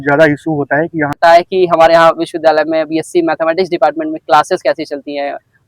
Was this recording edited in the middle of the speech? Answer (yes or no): yes